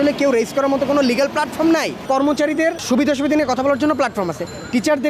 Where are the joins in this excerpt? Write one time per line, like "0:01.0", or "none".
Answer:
0:02.1
0:02.8